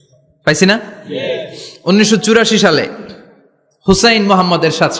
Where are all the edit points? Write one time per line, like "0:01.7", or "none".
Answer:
none